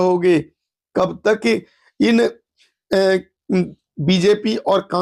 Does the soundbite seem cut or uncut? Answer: uncut